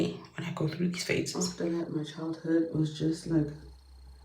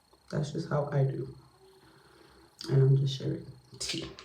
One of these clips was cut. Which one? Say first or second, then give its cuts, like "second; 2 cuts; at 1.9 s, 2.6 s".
first; 1 cut; at 1.3 s